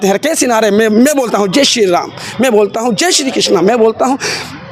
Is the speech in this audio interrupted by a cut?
no; 0 cuts

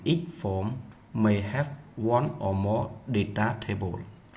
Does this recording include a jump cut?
yes; 1 cut; at 1.7 s

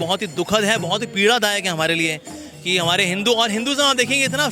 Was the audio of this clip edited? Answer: no; 0 cuts

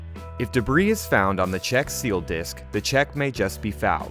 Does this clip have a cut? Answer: no; 0 cuts

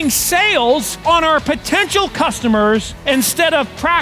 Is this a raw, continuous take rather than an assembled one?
no; 2 cuts; at 0.9 s, 2.9 s

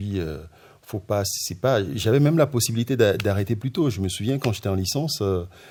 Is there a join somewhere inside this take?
no; 0 cuts

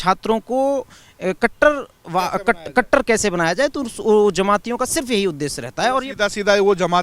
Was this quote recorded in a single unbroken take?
yes; 0 cuts

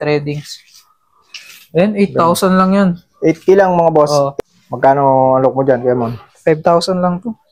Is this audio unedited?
no; 1 cut; at 4.3 s

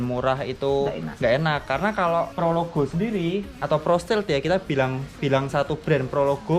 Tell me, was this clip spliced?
no; 0 cuts

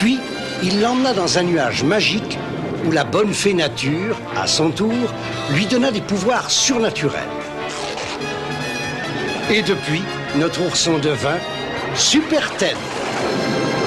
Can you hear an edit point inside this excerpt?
no; 0 cuts

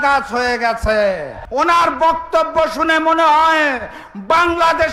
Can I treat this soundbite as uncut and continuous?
no; 1 cut; at 1.3 s

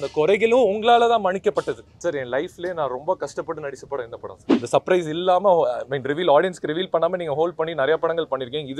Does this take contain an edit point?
yes; 2 cuts; at 1.9 s, 4.4 s

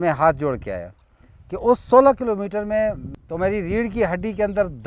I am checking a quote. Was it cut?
no; 0 cuts

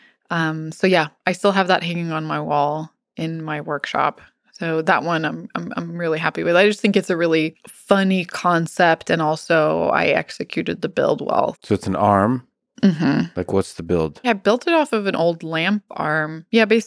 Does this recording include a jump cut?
yes; 3 cuts; at 7.7 s, 11.6 s, 14.3 s

